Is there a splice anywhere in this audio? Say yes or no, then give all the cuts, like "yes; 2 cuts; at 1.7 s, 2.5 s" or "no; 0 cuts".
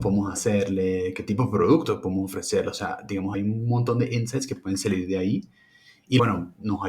yes; 2 cuts; at 3.3 s, 6.2 s